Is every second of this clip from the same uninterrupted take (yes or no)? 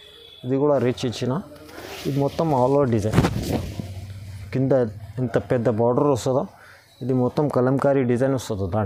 yes